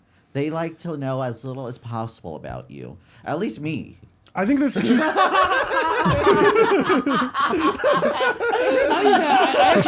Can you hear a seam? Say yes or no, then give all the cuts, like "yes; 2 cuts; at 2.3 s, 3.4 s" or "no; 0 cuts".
no; 0 cuts